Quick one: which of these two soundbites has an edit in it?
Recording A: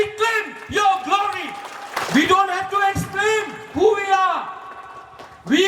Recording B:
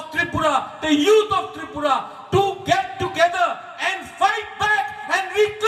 A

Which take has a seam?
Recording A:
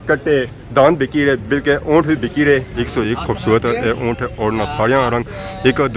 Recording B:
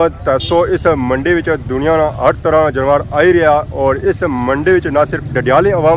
A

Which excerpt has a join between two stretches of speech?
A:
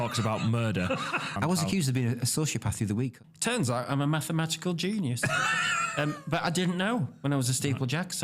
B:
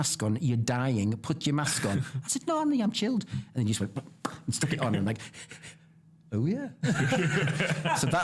A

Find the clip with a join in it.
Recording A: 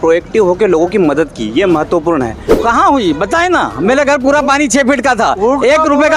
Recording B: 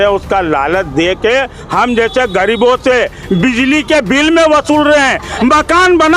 A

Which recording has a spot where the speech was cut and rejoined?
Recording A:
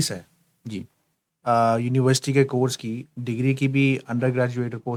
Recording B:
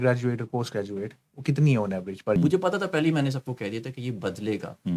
B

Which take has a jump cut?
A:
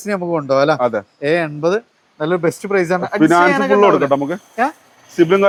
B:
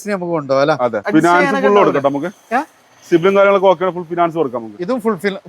B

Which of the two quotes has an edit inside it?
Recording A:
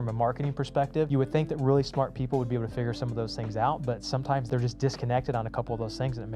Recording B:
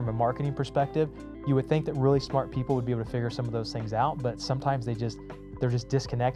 A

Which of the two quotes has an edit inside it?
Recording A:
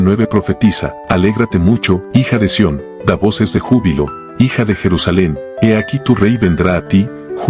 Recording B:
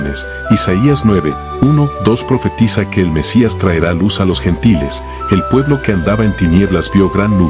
A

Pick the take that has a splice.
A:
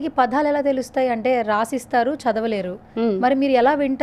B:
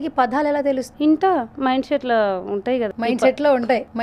B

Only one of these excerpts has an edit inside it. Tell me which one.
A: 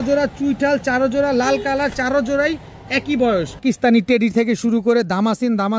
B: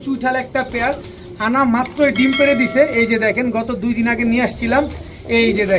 A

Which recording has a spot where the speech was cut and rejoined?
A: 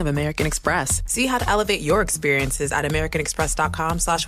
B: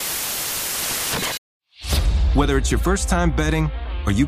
B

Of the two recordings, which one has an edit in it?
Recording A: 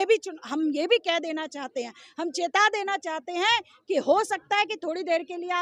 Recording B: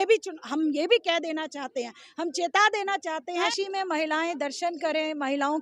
B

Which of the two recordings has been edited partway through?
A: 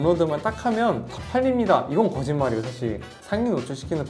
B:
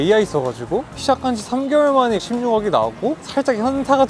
B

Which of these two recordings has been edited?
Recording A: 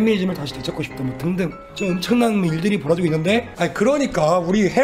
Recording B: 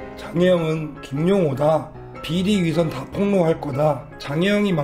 A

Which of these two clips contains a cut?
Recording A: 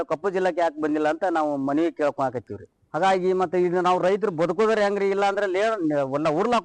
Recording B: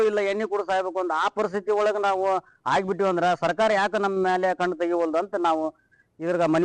A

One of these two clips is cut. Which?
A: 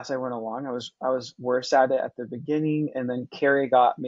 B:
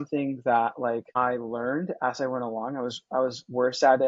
B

